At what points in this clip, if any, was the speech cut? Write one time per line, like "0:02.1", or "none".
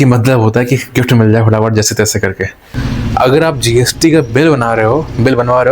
0:02.8